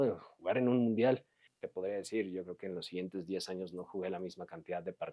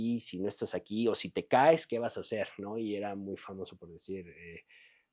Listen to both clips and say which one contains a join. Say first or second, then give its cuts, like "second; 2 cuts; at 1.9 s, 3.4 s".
first; 1 cut; at 1.6 s